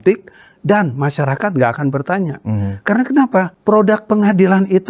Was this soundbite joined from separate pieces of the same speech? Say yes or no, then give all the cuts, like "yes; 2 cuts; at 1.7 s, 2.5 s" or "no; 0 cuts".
yes; 1 cut; at 3.5 s